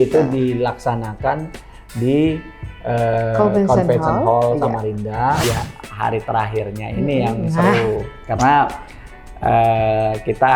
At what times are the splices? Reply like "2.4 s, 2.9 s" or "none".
5.4 s